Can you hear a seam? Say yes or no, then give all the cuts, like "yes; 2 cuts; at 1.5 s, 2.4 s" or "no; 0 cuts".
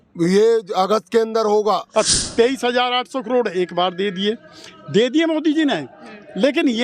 yes; 1 cut; at 1.9 s